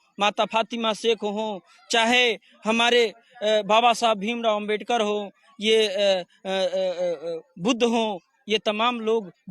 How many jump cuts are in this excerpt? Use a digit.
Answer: 0